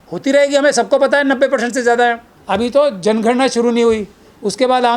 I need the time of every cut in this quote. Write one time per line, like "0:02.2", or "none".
0:02.3